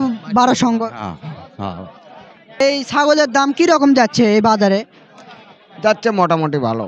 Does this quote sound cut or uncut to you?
cut